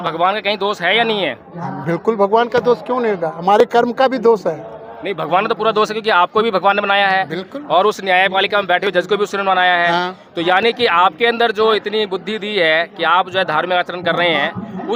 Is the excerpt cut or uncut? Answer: uncut